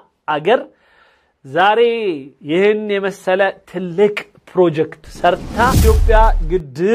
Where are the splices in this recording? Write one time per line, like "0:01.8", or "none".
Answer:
0:05.8